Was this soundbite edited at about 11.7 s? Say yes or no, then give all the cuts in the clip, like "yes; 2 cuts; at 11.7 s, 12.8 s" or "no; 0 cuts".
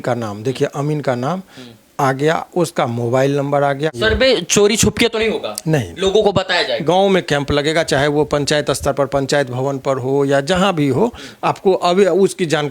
no; 2 cuts; at 3.9 s, 6.8 s